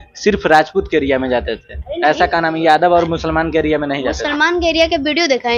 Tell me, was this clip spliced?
no; 0 cuts

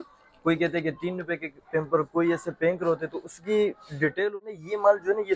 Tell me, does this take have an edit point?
yes; 1 cut; at 4.4 s

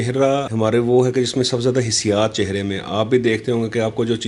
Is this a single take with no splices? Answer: yes; 0 cuts

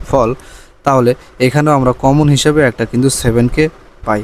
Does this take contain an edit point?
no; 0 cuts

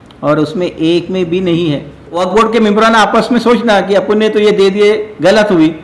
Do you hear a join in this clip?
yes; 1 cut; at 2.2 s

